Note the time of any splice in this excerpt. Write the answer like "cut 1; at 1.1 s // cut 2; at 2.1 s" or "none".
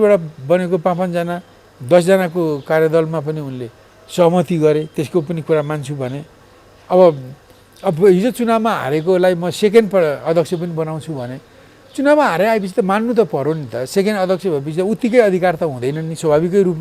none